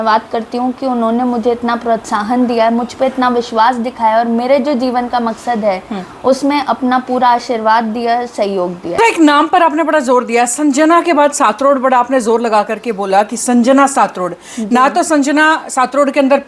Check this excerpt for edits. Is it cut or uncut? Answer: cut